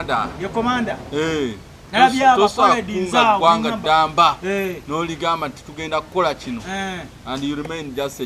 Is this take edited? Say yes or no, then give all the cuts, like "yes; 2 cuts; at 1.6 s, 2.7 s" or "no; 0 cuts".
no; 0 cuts